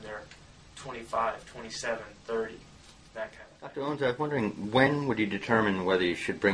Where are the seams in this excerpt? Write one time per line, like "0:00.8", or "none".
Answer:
0:03.5